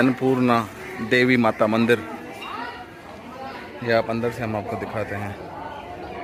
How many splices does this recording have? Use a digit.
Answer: 0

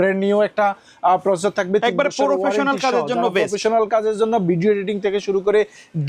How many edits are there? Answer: 0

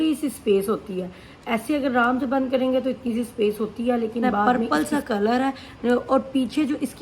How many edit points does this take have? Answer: 1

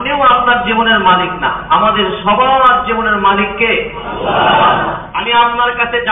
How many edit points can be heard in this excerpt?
1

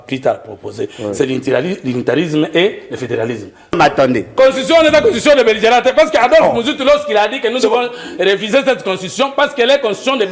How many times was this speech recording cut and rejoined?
1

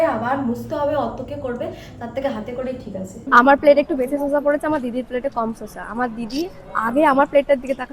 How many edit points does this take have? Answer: 1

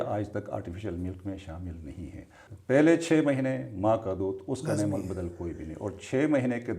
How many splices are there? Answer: 1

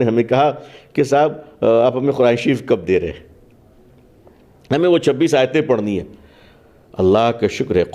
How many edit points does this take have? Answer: 0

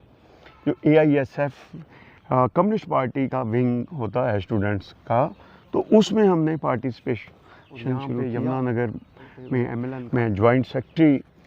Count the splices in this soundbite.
2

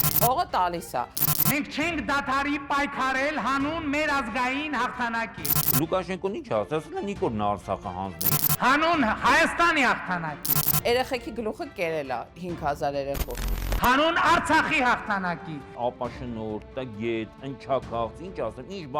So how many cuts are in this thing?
0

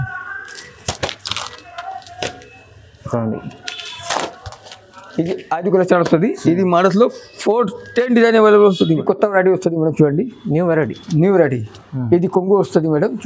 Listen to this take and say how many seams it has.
1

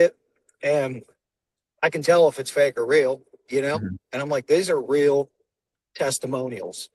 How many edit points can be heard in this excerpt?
0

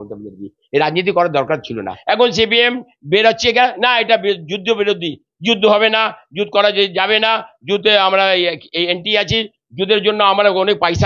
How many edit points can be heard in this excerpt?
1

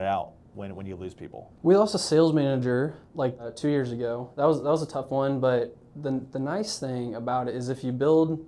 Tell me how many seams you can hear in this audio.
2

